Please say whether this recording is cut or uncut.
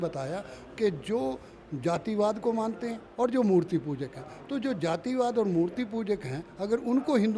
uncut